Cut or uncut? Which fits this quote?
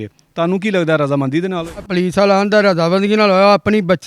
cut